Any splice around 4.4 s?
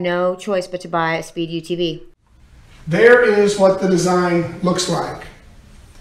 no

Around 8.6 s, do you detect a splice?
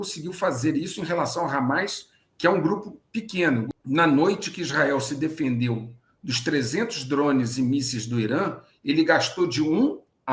no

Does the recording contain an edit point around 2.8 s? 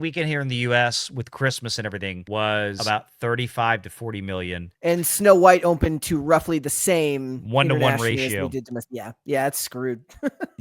yes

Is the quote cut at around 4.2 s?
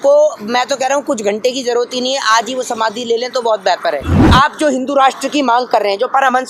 yes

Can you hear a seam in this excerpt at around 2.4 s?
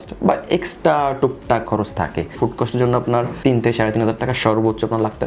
yes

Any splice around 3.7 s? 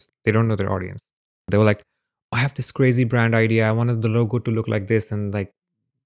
no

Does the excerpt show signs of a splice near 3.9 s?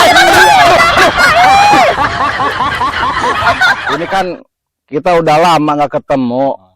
yes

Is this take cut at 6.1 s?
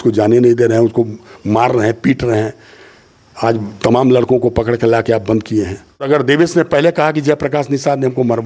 yes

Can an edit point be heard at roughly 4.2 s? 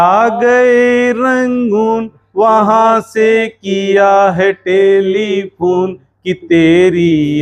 no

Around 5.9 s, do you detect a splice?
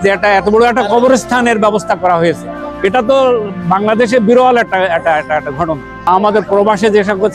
yes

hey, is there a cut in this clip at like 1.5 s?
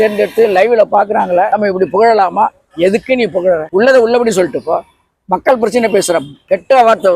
yes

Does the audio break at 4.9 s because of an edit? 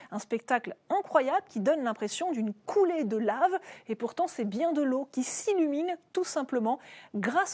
yes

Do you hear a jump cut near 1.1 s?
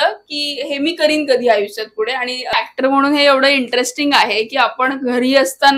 no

